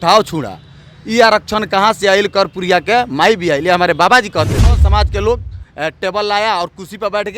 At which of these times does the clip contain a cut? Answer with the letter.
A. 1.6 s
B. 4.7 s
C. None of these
B